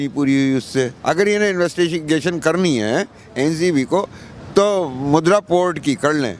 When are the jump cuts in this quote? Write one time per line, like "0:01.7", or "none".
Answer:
0:01.0